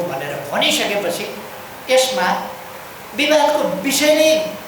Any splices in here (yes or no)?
no